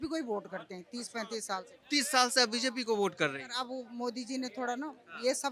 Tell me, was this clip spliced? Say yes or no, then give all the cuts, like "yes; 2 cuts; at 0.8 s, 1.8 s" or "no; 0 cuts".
no; 0 cuts